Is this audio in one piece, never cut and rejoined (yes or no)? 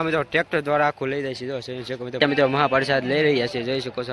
no